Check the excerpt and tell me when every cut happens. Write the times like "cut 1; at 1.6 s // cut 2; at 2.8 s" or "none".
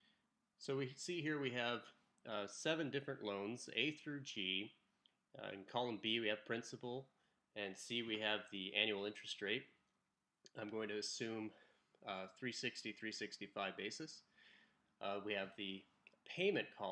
cut 1; at 8.0 s